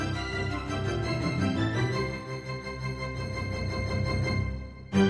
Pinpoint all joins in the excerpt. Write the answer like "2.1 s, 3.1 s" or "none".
none